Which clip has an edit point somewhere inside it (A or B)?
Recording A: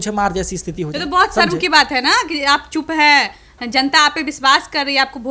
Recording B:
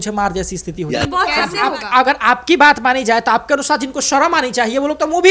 B